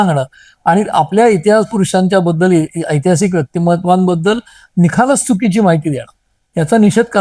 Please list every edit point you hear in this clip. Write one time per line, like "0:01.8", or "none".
none

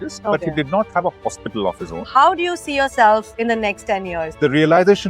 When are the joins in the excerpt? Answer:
0:01.9
0:04.2

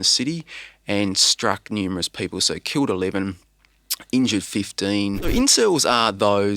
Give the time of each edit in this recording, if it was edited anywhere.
0:05.3

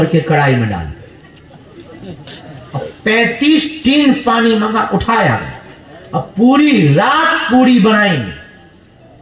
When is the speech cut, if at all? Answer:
0:02.3

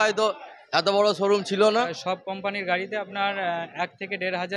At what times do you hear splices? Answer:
0:02.0

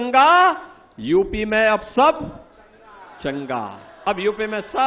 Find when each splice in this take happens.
0:03.9

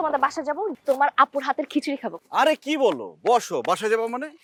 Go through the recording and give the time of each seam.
none

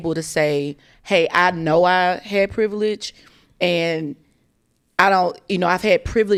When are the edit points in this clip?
none

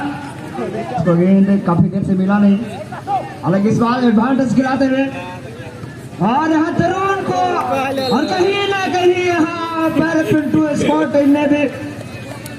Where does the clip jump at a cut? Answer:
0:01.0

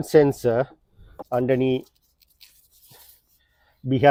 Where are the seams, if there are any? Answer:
none

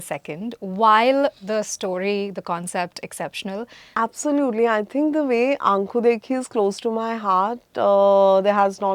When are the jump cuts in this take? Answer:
0:03.8

